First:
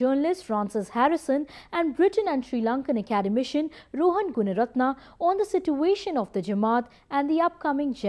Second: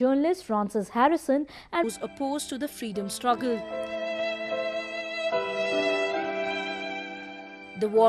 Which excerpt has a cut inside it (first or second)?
first